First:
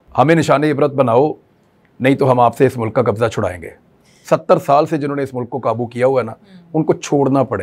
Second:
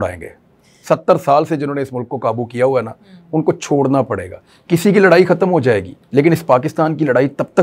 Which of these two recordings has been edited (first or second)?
second